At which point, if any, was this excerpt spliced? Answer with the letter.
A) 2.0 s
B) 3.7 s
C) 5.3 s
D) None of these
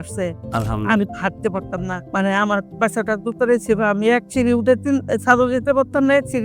A